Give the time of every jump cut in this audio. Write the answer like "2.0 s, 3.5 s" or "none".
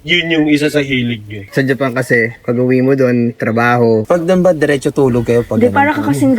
1.3 s, 4.0 s